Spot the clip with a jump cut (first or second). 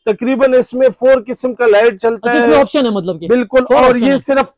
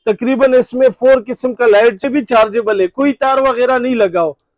second